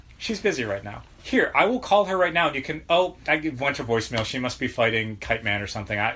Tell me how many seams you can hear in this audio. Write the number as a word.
one